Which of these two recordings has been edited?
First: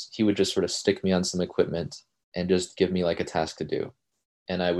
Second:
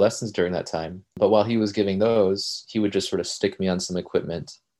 second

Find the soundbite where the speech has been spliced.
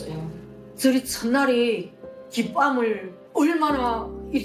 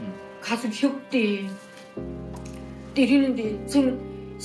first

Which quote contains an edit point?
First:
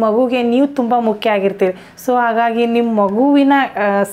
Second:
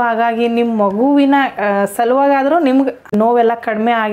second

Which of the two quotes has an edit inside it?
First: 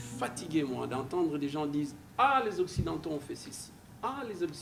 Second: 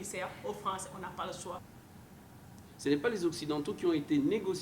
second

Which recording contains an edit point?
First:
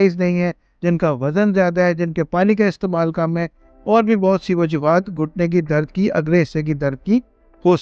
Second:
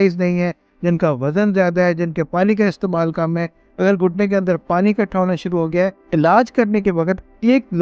second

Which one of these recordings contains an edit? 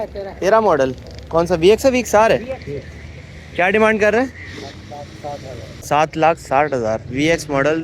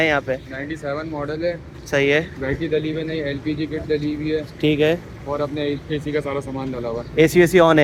first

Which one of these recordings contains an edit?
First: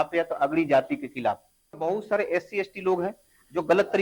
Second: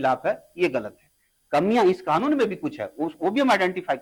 first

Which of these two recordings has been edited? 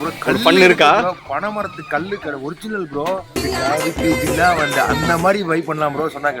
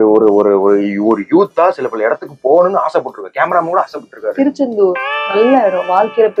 first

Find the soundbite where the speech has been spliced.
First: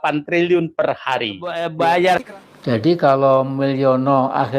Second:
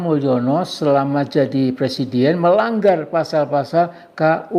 first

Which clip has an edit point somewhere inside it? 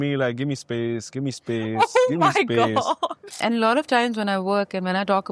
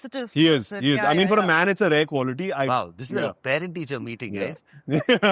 first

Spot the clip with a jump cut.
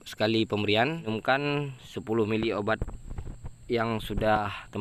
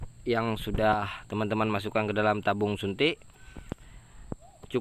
first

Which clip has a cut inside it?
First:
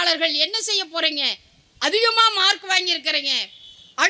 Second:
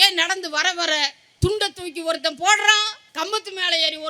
second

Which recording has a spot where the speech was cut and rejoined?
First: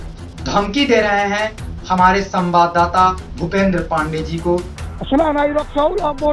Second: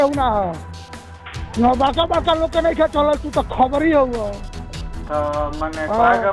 first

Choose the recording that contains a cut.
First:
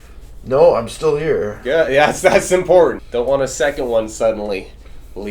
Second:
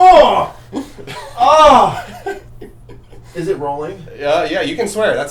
first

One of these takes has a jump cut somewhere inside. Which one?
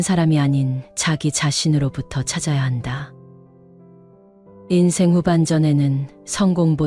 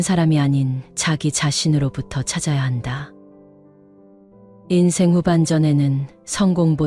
second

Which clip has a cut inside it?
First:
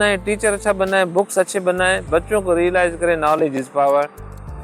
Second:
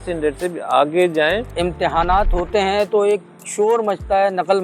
second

